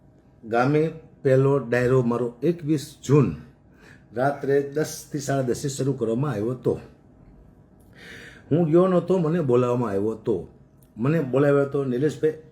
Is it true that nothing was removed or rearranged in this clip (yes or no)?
yes